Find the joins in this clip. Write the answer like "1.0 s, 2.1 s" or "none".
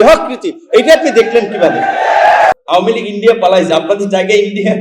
2.5 s